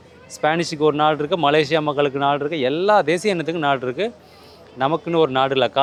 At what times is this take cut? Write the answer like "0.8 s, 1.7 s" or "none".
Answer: none